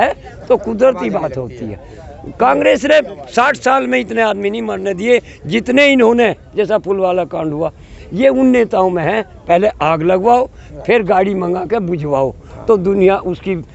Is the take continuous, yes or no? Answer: yes